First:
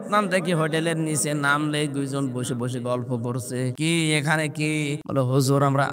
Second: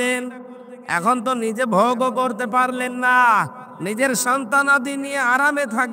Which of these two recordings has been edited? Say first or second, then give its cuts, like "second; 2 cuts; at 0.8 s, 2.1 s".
first; 2 cuts; at 3.7 s, 5.0 s